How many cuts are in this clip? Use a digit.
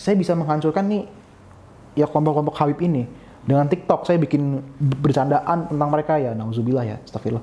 0